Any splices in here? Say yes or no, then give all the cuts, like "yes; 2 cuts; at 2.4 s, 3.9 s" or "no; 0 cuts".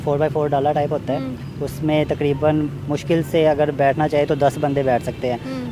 no; 0 cuts